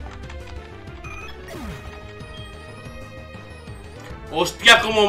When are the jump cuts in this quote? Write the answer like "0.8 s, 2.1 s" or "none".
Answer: 4.0 s